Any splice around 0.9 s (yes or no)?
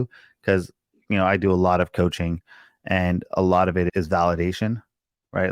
no